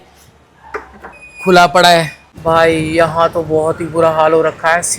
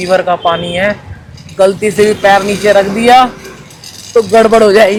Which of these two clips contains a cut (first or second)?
first